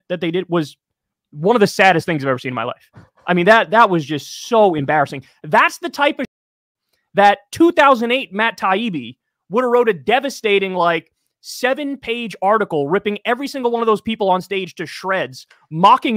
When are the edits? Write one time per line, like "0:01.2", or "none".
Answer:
none